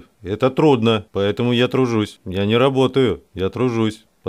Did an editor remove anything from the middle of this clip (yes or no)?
yes